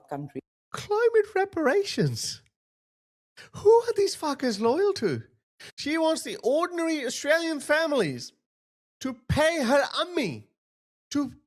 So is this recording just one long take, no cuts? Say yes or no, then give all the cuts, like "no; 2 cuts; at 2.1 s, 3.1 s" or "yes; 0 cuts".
yes; 0 cuts